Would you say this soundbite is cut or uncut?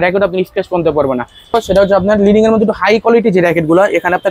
cut